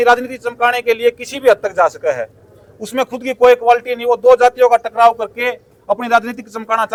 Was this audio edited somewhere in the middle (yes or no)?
no